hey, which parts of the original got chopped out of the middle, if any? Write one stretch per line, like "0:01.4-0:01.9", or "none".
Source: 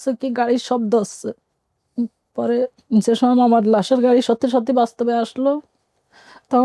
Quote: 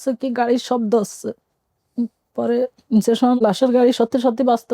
0:03.4-0:03.7